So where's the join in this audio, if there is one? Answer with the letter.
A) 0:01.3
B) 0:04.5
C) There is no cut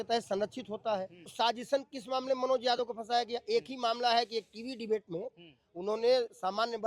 A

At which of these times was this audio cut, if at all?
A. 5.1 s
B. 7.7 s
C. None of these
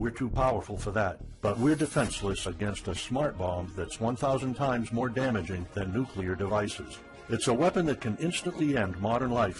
C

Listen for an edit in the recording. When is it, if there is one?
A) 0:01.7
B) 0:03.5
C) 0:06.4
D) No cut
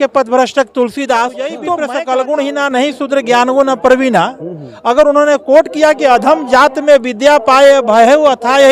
A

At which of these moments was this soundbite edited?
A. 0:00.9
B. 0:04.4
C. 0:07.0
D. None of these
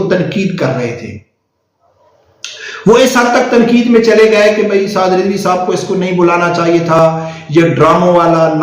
D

